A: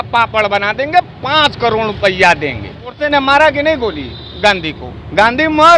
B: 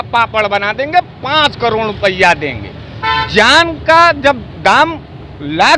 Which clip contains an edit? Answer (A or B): A